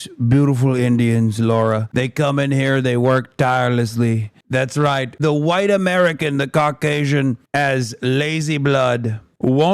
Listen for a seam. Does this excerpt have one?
yes; 1 cut; at 5.1 s

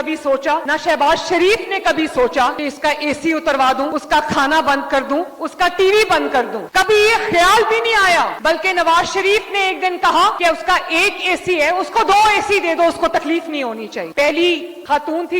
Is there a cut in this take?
yes; 1 cut; at 14.1 s

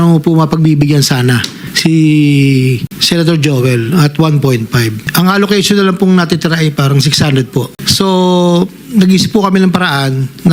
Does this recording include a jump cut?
no; 0 cuts

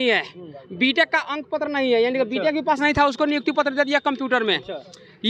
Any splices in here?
no; 0 cuts

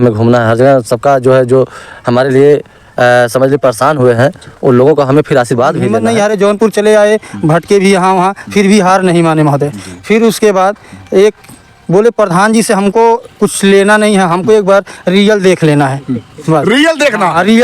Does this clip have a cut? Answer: yes; 1 cut; at 6.0 s

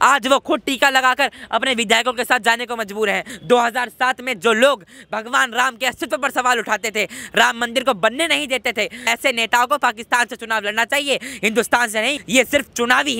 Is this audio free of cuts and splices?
no; 3 cuts; at 3.4 s, 9.1 s, 12.2 s

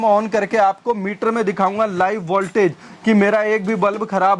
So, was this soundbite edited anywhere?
no; 0 cuts

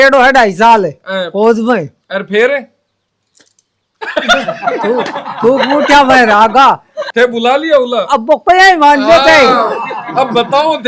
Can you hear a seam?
no; 0 cuts

